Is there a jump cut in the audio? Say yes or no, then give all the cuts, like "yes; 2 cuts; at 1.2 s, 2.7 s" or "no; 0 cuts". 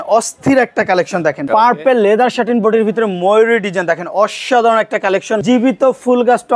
yes; 2 cuts; at 1.5 s, 5.4 s